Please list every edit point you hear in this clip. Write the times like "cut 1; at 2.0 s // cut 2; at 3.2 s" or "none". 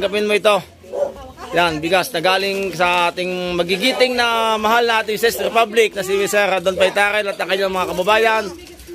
none